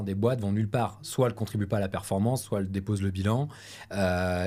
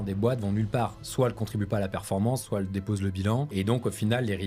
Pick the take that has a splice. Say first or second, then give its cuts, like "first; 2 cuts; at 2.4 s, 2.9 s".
second; 1 cut; at 3.5 s